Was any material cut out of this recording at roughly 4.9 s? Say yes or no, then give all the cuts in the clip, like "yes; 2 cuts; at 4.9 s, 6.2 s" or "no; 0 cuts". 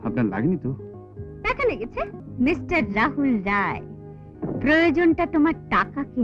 no; 1 cut; at 2.2 s